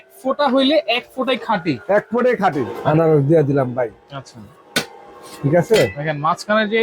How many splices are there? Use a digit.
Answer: 1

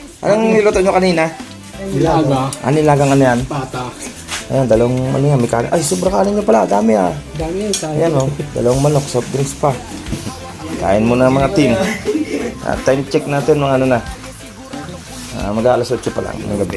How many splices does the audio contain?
1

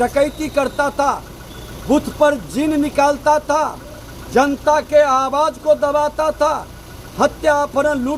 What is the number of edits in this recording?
0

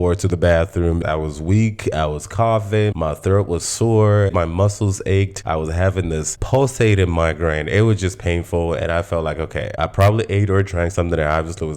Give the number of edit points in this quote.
4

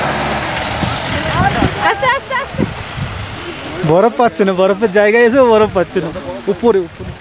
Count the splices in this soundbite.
1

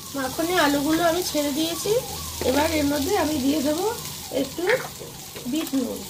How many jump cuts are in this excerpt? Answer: 0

